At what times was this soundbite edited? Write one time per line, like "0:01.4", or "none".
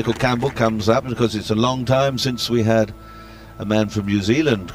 0:01.1